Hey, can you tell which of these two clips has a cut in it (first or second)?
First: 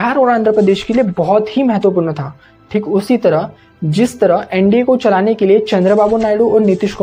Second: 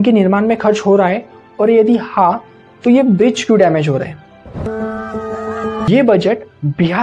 second